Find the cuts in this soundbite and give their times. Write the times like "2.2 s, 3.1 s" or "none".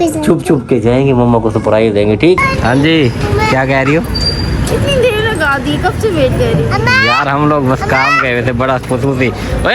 2.0 s